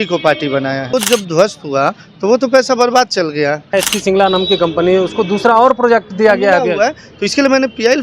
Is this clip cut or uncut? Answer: cut